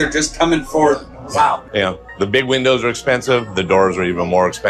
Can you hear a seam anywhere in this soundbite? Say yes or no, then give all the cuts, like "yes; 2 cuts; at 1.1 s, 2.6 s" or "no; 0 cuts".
no; 0 cuts